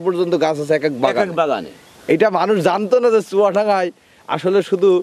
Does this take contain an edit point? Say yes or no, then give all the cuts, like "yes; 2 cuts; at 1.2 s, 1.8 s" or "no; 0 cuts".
no; 0 cuts